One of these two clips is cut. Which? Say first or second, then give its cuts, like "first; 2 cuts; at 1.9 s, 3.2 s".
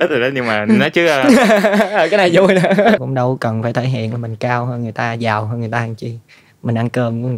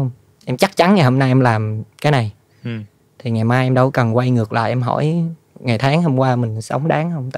first; 1 cut; at 3.0 s